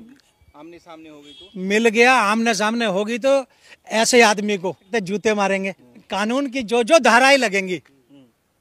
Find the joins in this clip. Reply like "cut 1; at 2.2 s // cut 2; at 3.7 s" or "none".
cut 1; at 4.8 s // cut 2; at 6.1 s